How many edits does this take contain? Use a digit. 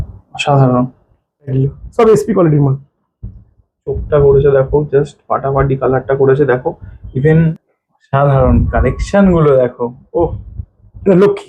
2